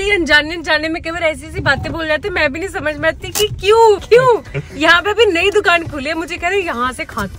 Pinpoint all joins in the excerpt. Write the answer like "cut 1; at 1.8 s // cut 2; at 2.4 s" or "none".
none